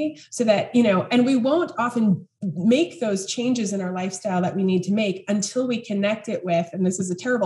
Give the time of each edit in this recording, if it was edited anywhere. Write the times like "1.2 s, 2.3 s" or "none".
none